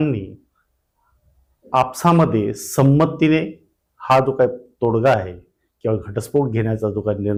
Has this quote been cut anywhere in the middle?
no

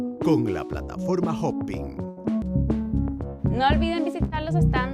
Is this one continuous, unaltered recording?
no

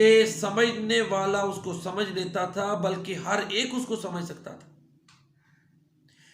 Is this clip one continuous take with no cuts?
no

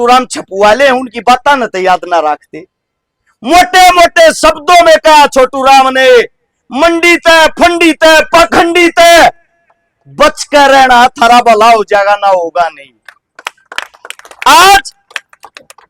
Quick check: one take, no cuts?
yes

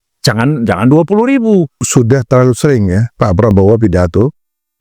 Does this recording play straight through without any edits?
no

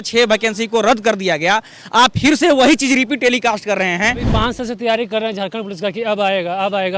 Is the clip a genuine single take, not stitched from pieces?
no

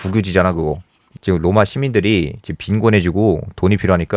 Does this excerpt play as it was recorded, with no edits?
no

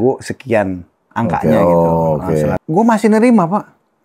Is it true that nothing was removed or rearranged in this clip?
no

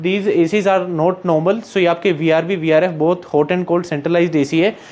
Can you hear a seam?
no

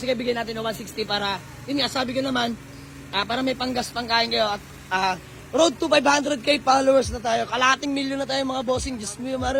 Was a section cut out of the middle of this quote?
no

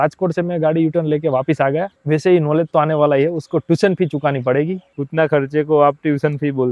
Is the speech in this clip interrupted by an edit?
yes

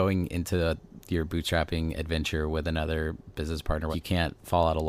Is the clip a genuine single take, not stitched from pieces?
no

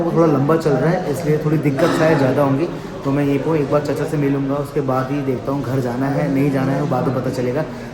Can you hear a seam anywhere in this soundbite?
no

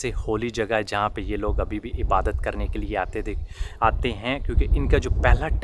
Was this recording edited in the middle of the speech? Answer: no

